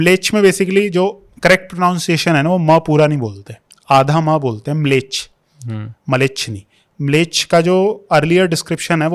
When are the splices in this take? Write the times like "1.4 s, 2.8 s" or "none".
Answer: none